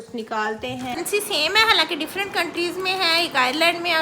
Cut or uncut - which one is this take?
cut